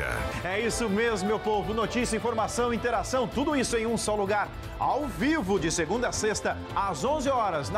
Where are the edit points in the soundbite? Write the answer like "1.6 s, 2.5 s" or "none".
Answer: none